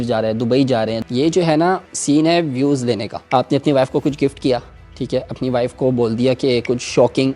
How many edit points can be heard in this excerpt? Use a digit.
3